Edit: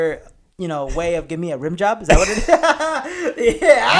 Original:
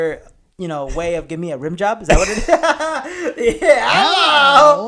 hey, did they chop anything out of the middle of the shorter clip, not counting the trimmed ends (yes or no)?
no